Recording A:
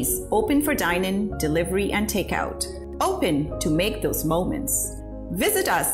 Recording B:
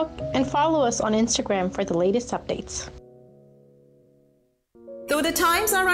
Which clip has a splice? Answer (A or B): B